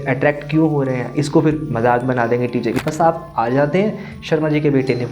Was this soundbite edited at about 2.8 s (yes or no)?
yes